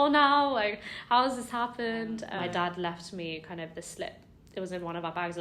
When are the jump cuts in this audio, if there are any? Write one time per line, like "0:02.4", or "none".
0:02.3